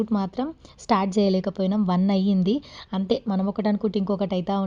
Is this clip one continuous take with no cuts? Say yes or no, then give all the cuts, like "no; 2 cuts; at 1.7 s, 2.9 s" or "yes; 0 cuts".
yes; 0 cuts